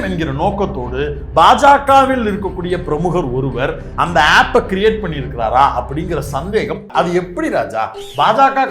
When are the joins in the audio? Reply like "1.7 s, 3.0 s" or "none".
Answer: 6.9 s